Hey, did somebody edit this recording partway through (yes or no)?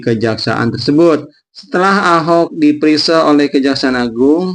yes